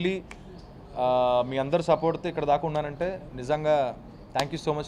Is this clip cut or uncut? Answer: uncut